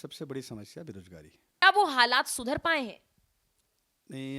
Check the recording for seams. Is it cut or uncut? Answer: cut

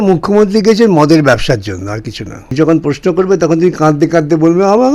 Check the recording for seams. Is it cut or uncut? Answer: cut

